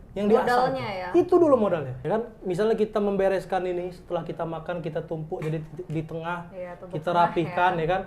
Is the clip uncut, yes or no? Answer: no